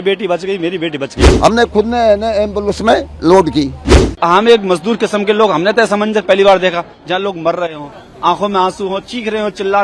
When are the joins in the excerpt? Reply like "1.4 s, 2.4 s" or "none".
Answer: 1.3 s, 4.0 s